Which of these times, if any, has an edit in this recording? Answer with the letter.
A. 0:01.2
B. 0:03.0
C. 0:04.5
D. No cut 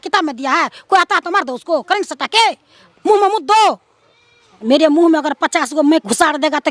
C